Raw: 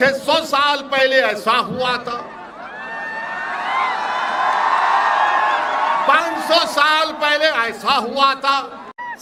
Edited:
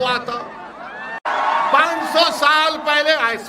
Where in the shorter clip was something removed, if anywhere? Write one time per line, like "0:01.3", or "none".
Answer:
0:01.3